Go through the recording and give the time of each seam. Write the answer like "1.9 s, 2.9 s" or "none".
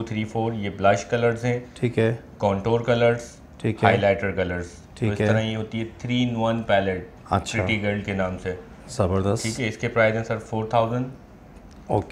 none